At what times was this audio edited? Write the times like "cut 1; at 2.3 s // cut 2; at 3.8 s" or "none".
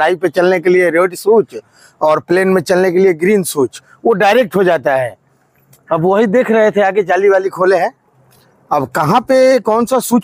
none